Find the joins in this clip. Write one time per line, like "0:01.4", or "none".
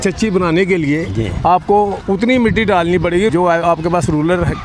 0:02.0
0:03.3